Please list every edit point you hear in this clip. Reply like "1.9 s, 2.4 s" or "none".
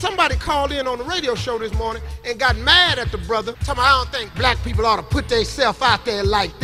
3.6 s